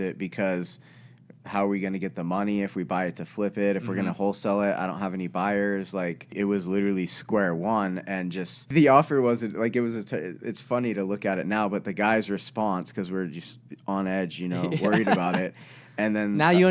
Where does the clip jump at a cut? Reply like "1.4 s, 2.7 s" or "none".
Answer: 6.3 s, 8.7 s